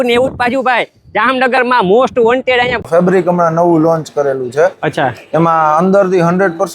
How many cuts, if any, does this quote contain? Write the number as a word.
one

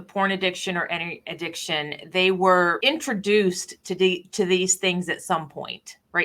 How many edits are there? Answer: one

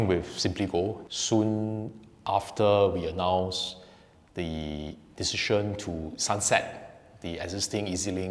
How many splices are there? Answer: one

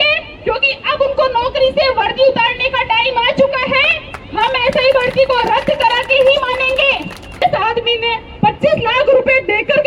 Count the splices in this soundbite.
one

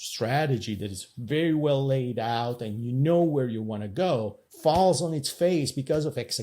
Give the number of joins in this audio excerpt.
one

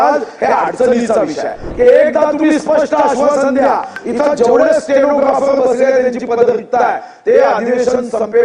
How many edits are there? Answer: one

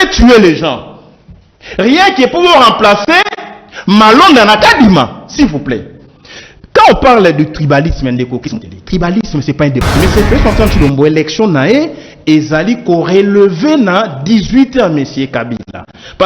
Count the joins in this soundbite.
one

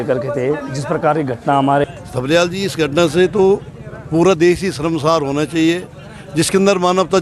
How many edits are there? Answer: one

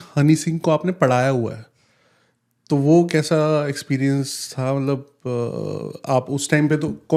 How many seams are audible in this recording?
zero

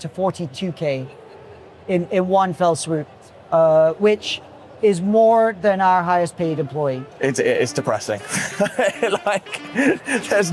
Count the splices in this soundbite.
one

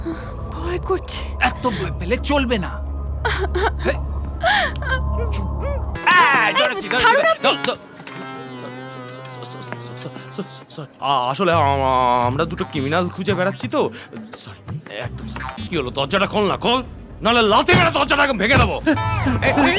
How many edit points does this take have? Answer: two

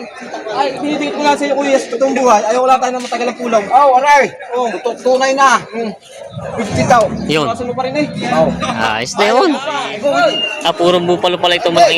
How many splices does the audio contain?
one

